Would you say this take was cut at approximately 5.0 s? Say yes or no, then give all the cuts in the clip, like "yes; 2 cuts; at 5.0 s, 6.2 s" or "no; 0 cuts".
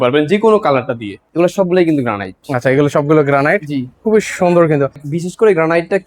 yes; 2 cuts; at 1.2 s, 5.0 s